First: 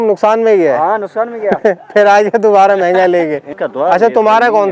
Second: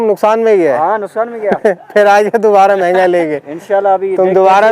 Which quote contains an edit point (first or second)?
first